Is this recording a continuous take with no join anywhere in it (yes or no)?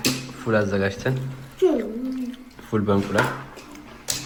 yes